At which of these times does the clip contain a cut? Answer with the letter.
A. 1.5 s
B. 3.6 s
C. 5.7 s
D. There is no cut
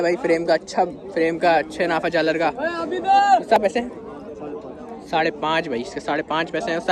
B